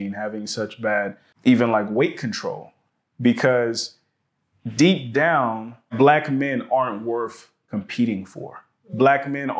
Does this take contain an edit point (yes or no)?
yes